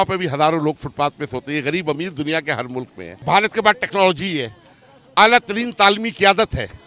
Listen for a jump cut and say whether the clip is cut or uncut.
uncut